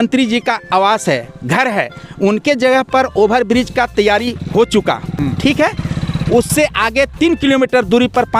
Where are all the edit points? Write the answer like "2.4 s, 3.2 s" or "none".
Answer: none